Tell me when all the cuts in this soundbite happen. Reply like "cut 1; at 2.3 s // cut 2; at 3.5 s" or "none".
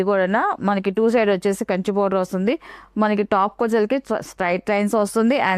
none